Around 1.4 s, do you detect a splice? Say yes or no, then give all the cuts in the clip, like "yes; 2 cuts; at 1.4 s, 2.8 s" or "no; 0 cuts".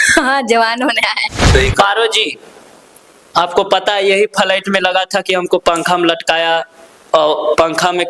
yes; 1 cut; at 1.4 s